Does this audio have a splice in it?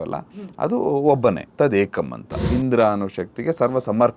yes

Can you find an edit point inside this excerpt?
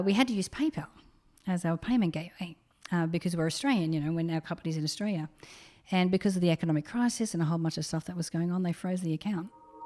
no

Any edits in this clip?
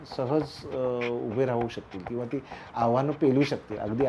no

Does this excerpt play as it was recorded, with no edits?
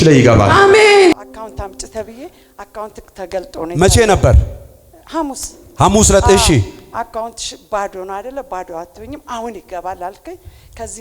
no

